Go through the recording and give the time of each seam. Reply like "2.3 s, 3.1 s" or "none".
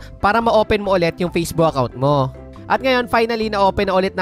2.4 s